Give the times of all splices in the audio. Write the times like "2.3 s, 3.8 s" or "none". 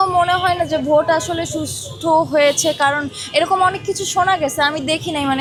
none